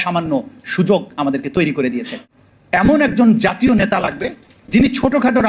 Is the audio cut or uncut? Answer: cut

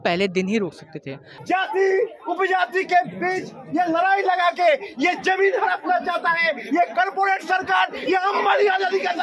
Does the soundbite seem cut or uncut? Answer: cut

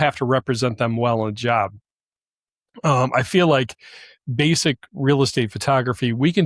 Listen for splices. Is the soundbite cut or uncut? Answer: uncut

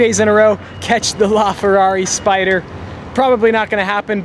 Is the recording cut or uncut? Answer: cut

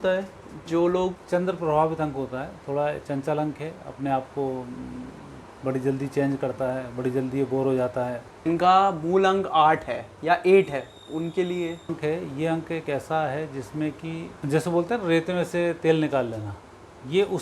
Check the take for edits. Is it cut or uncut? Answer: cut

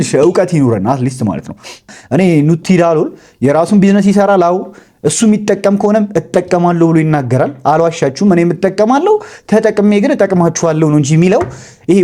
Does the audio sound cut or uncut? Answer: cut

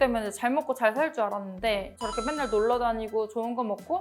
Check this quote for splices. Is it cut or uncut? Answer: cut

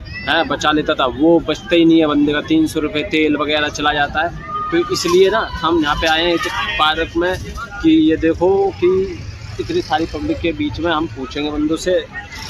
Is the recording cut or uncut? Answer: uncut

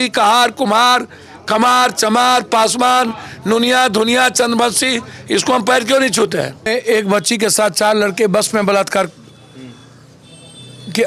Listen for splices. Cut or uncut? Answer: cut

